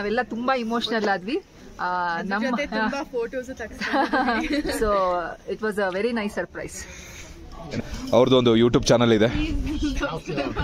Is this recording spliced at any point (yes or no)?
yes